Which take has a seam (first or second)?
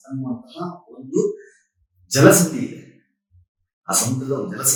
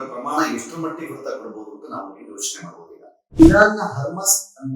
second